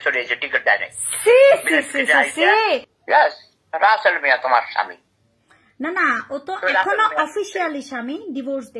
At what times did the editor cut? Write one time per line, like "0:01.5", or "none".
0:02.9